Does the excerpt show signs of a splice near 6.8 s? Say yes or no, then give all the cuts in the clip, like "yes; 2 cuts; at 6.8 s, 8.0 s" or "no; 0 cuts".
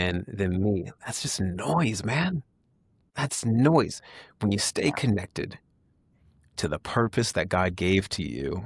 no; 0 cuts